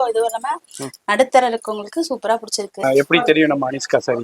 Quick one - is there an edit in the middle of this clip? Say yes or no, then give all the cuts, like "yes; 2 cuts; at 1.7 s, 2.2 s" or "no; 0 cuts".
yes; 1 cut; at 2.8 s